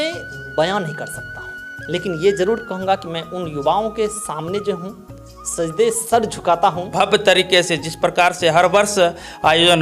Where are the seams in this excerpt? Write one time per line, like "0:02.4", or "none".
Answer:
0:06.9